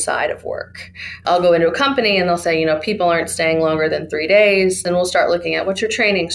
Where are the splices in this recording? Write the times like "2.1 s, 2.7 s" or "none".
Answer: 1.2 s, 4.8 s